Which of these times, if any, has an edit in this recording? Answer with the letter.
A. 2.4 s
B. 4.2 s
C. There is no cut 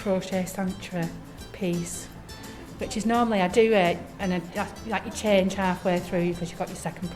C